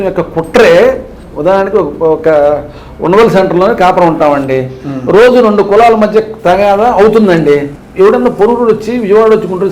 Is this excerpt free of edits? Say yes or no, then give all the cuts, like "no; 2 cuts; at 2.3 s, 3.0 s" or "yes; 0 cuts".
no; 1 cut; at 7.8 s